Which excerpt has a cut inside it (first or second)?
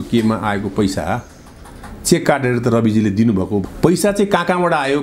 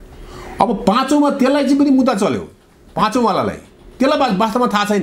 first